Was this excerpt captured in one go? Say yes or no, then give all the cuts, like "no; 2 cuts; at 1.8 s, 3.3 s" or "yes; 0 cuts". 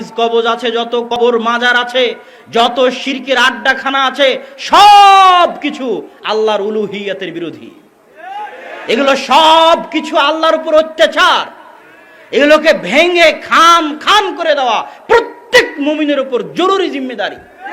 no; 1 cut; at 1.2 s